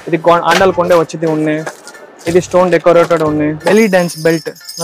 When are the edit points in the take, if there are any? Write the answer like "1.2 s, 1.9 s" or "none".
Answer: 3.6 s

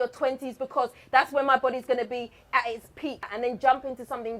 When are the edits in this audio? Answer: 3.3 s

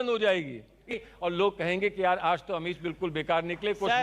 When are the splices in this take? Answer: 0.9 s

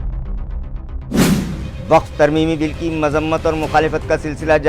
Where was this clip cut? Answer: 1.2 s

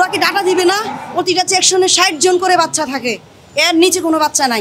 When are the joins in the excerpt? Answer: 1.0 s

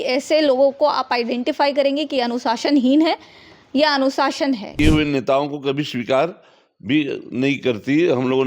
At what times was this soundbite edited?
4.7 s

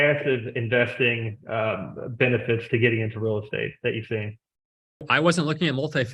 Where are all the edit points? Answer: 5.1 s

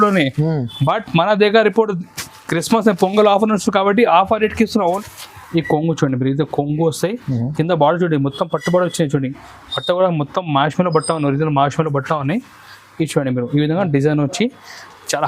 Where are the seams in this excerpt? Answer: 5.0 s

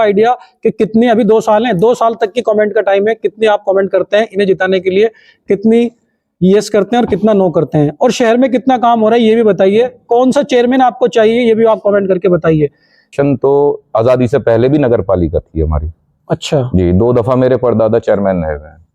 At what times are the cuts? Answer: 13.1 s

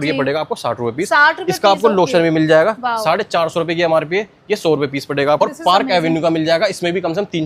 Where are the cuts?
5.4 s

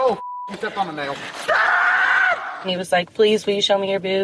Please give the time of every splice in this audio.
2.6 s

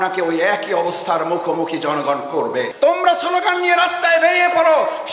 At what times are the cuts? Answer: 2.7 s

